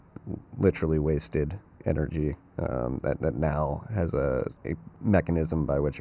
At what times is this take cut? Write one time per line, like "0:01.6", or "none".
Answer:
0:04.6